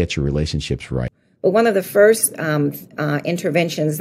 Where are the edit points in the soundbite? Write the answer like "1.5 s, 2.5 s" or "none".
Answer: 1.2 s